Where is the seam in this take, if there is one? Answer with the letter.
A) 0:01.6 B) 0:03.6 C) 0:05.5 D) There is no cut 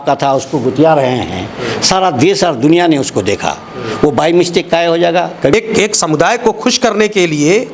C